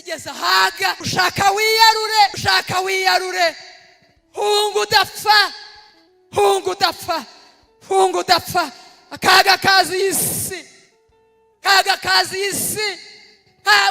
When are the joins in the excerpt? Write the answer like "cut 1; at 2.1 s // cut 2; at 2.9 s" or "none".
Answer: cut 1; at 1.0 s // cut 2; at 2.4 s